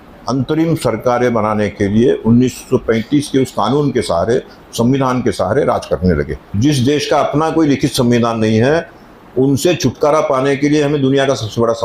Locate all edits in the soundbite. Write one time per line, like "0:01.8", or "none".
0:06.5